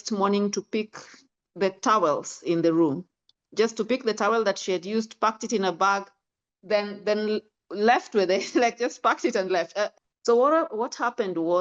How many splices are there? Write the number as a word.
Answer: one